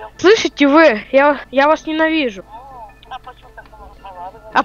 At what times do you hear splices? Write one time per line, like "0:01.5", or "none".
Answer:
0:01.4
0:02.5